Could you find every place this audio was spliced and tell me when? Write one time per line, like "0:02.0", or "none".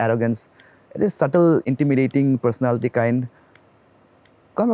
0:01.6